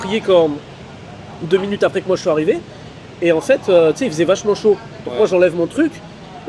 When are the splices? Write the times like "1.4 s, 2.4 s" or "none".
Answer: none

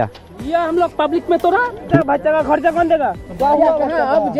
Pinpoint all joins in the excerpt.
1.9 s

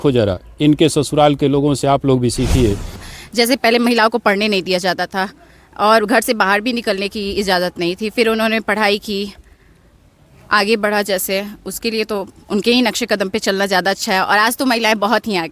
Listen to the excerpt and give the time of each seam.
3.0 s

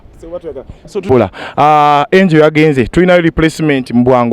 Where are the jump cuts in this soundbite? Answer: 1.1 s

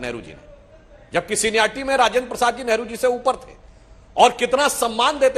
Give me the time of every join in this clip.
none

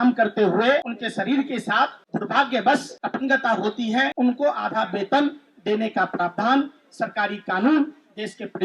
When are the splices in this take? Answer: 1.0 s, 2.0 s, 3.0 s, 4.1 s

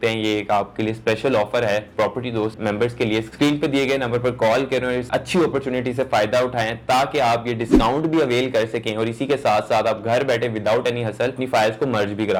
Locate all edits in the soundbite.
none

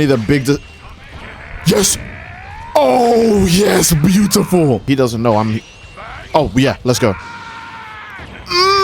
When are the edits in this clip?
4.8 s

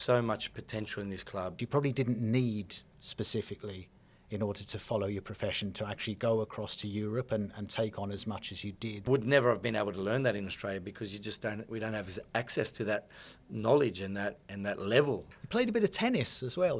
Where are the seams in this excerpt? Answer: 1.6 s, 9.1 s, 15.3 s

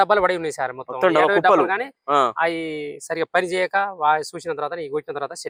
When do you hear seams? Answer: none

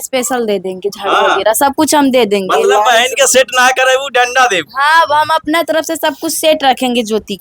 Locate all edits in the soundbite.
none

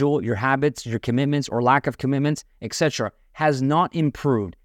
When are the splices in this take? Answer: none

